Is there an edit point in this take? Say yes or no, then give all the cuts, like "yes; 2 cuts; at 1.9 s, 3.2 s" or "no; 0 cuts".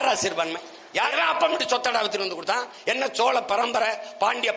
yes; 1 cut; at 1.1 s